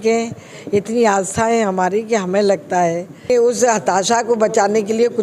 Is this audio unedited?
no; 1 cut; at 3.3 s

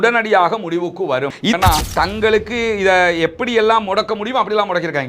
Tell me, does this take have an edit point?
yes; 1 cut; at 1.5 s

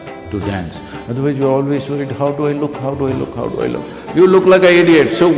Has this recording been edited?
no; 0 cuts

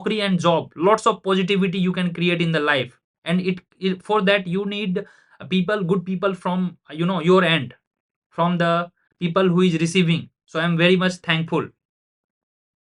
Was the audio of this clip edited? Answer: no; 0 cuts

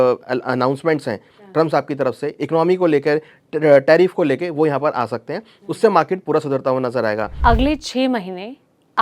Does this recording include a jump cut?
yes; 1 cut; at 7.3 s

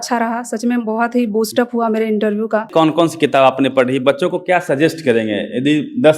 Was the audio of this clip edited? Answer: yes; 1 cut; at 2.7 s

